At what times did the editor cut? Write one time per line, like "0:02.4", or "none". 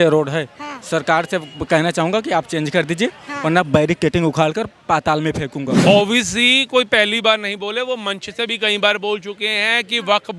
0:05.7